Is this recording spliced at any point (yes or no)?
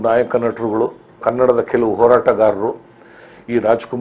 yes